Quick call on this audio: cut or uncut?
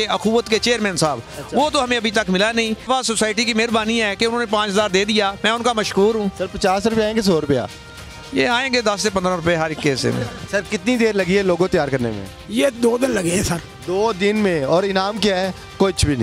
cut